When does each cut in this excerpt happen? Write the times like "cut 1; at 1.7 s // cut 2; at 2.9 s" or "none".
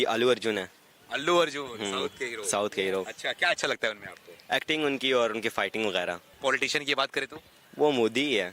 cut 1; at 1.4 s // cut 2; at 6.3 s